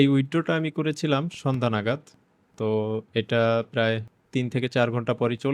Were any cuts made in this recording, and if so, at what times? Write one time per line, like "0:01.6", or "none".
0:04.1